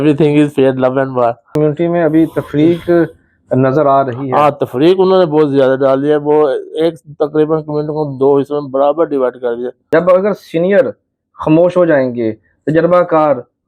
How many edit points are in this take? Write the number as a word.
two